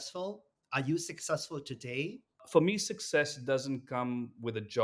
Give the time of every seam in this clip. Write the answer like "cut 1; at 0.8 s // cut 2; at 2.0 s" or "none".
cut 1; at 2.4 s